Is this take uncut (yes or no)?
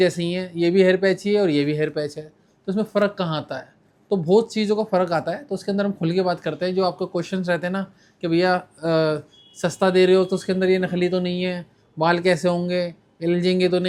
yes